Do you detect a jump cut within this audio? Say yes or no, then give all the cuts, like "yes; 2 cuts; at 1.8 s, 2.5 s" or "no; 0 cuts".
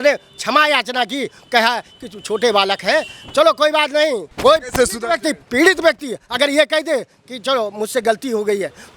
yes; 1 cut; at 4.3 s